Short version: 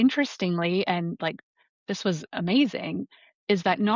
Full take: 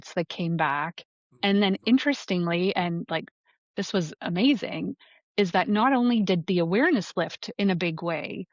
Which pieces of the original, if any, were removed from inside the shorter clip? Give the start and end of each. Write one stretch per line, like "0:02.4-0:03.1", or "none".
none